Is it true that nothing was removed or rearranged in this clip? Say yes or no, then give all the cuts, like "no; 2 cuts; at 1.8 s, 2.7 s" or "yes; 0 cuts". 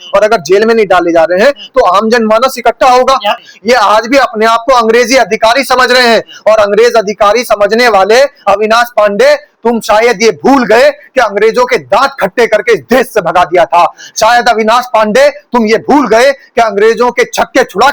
no; 1 cut; at 3.4 s